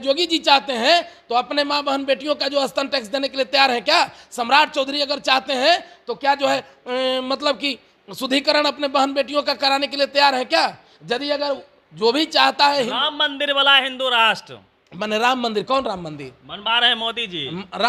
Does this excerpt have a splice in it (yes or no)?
no